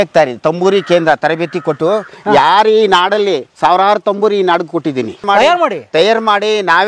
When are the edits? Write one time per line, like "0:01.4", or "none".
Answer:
0:05.2